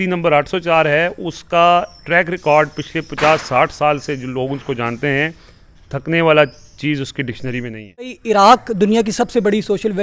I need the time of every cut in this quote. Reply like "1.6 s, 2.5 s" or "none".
8.2 s